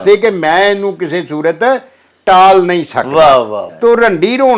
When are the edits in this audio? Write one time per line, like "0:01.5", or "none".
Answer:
0:03.7